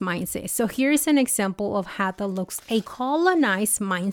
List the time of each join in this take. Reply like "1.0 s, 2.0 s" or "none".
2.8 s